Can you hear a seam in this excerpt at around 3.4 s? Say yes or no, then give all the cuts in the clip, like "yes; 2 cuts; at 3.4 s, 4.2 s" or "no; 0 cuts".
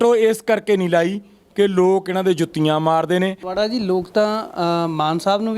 yes; 1 cut; at 3.4 s